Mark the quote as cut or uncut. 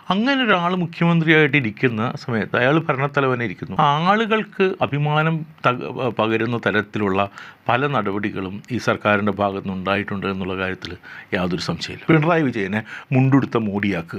cut